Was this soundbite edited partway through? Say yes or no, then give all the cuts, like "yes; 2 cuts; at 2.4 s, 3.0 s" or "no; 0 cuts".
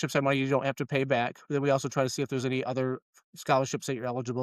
no; 0 cuts